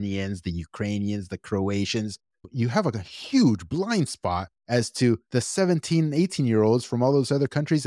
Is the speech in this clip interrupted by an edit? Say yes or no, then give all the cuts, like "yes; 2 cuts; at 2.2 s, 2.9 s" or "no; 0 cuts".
yes; 2 cuts; at 4.5 s, 5.2 s